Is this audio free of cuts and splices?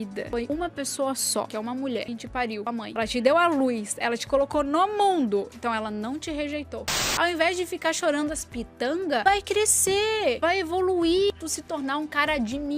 no; 3 cuts; at 2.9 s, 7.1 s, 11.3 s

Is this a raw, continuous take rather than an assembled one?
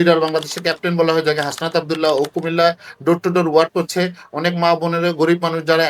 yes; 0 cuts

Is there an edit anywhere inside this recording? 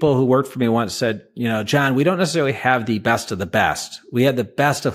no; 0 cuts

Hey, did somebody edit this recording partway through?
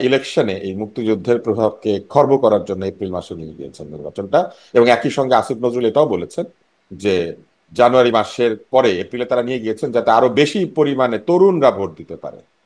no; 0 cuts

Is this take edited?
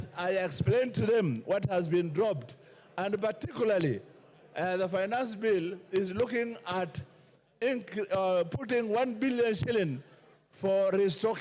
no; 0 cuts

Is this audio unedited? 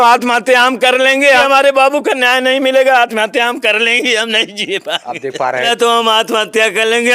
no; 2 cuts; at 1.4 s, 5.7 s

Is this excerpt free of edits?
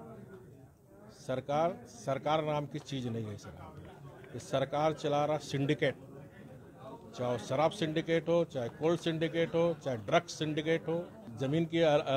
no; 1 cut; at 11.2 s

